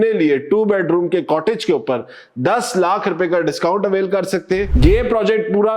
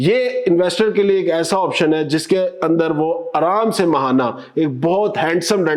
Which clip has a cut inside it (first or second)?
first